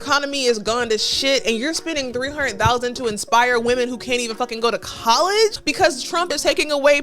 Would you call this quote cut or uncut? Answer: cut